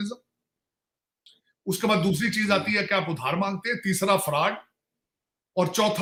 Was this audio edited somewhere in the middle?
no; 0 cuts

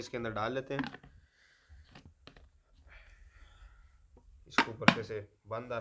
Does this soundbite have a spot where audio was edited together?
no; 0 cuts

